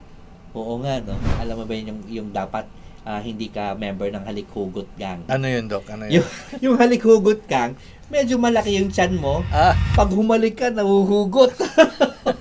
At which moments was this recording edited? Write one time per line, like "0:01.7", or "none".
0:01.4
0:05.3
0:06.4

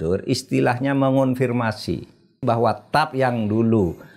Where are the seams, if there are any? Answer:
0:02.4

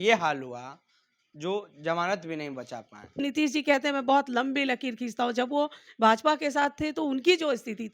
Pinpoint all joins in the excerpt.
0:03.2

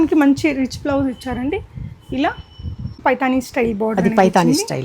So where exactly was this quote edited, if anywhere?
0:03.0

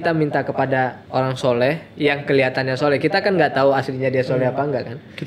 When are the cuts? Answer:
0:01.0

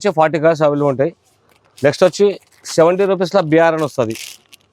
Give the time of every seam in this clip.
none

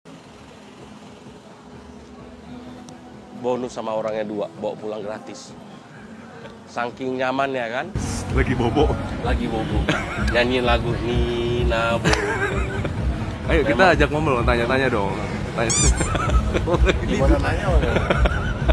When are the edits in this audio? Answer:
none

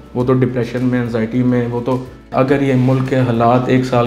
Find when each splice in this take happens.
0:02.3

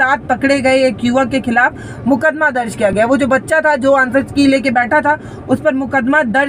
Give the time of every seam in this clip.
none

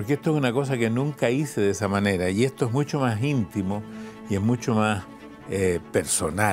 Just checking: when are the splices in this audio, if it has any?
none

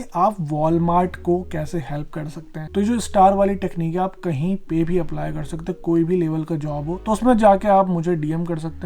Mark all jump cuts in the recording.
0:02.5
0:07.0

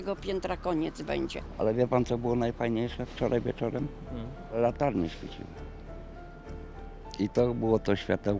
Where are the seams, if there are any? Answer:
0:01.4

